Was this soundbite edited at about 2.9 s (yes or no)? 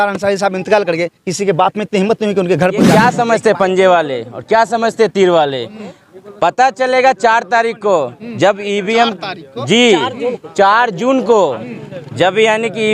yes